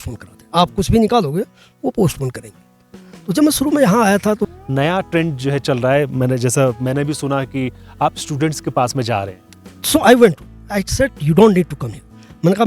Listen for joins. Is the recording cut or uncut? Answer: cut